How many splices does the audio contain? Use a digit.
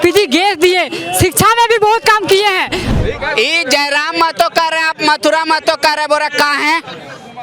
1